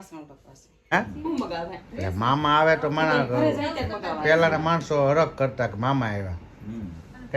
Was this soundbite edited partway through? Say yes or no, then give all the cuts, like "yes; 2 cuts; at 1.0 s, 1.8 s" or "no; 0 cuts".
yes; 1 cut; at 0.9 s